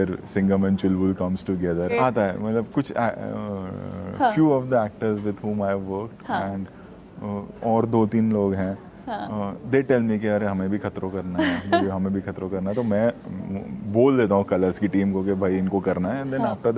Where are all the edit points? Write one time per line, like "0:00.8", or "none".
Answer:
0:01.9